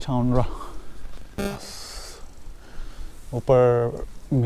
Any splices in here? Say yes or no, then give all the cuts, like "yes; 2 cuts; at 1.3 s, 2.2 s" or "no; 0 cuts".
yes; 1 cut; at 1.4 s